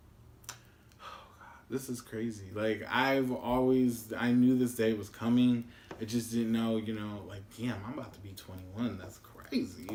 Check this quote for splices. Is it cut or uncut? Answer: uncut